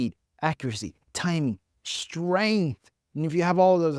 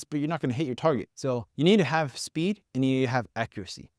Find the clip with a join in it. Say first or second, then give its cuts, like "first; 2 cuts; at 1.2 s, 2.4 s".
second; 2 cuts; at 1.4 s, 2.7 s